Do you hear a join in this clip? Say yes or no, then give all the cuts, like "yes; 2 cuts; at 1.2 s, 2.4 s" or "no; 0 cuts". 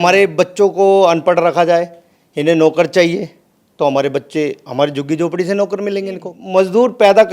yes; 1 cut; at 6.3 s